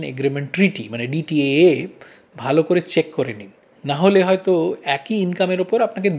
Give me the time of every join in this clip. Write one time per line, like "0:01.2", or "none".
none